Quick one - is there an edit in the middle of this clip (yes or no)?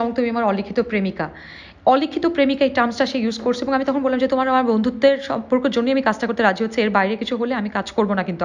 no